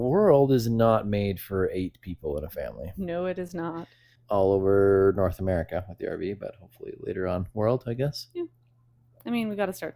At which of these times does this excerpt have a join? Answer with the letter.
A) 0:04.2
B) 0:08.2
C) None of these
A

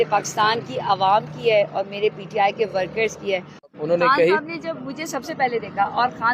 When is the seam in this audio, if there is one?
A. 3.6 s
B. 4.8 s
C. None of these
A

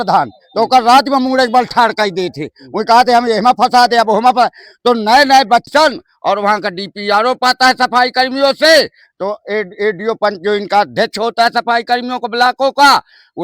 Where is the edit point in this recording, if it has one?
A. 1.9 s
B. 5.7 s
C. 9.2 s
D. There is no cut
B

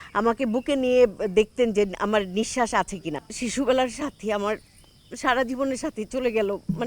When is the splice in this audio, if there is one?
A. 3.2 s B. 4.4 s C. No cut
A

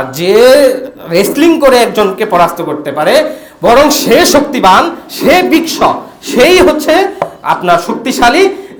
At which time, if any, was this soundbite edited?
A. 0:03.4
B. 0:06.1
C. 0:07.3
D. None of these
D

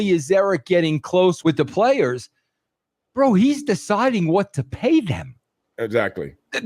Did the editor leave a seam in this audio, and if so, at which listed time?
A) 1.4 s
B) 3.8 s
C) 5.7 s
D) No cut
A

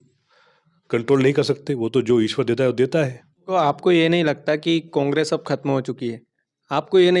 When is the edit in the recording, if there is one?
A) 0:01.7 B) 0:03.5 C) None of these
B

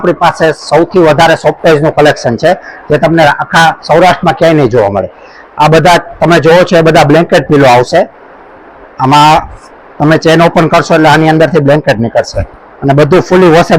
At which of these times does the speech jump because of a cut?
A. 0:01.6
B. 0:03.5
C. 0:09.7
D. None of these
D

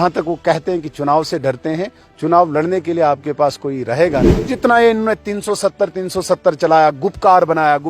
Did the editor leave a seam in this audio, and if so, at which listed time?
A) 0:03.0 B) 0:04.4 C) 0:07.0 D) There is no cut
B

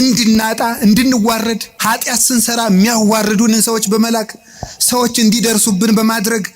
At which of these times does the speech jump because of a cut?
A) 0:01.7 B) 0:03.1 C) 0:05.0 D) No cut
A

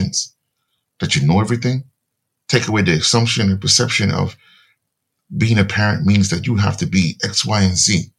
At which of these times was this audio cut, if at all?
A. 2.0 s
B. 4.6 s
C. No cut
C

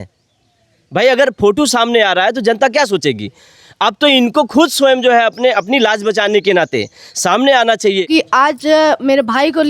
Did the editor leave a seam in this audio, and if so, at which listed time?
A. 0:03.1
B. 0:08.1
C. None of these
B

